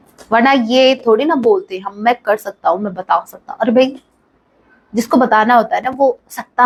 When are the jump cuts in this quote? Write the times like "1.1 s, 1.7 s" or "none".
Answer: none